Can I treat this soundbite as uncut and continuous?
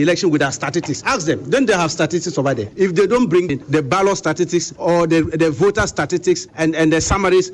no; 5 cuts; at 1.0 s, 2.7 s, 3.5 s, 4.7 s, 6.5 s

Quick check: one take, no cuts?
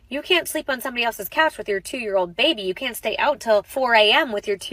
no; 1 cut; at 3.7 s

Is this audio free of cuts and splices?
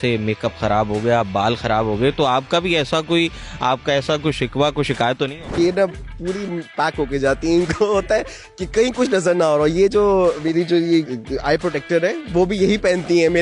no; 2 cuts; at 5.6 s, 11.1 s

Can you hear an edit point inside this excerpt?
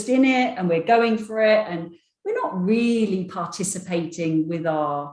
no; 0 cuts

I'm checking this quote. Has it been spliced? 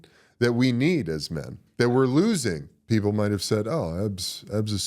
yes; 1 cut; at 2.7 s

